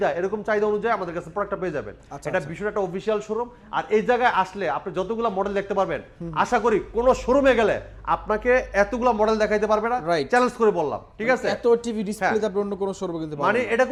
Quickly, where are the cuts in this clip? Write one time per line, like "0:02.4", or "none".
none